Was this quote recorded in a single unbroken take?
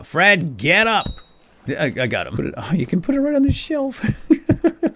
no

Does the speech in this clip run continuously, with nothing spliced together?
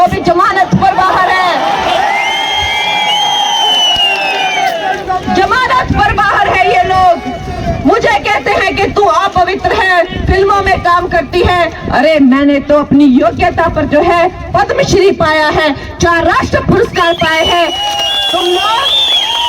yes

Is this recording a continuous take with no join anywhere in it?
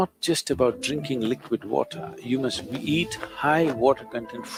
yes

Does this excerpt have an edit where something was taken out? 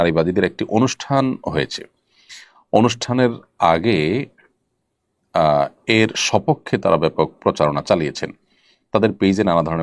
no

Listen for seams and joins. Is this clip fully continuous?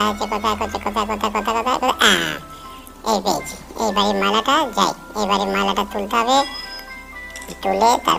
yes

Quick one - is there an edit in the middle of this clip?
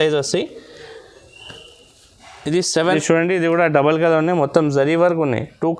yes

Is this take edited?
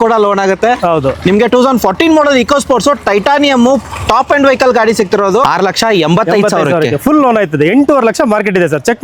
yes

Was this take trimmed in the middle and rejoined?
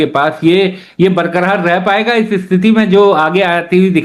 no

